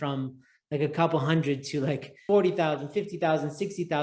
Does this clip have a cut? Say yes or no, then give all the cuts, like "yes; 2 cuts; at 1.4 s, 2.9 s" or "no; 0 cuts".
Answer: yes; 1 cut; at 2.2 s